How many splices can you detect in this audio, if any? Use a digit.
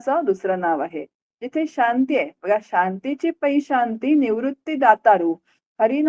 0